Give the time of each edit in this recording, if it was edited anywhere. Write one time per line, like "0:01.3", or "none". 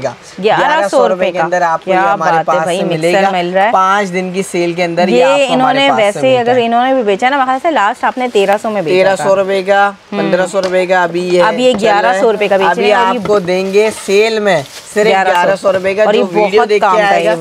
none